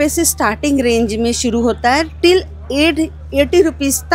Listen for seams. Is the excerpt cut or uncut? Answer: uncut